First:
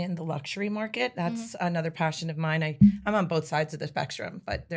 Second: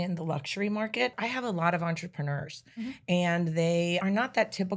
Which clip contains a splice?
second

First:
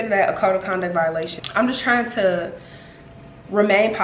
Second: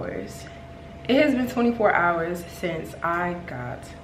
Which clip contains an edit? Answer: first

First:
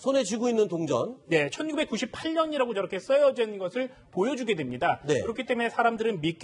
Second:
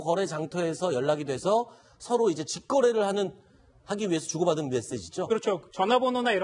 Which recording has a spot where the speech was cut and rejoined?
second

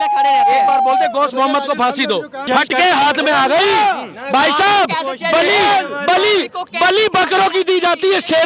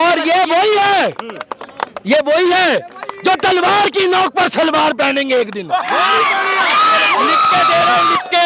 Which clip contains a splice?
first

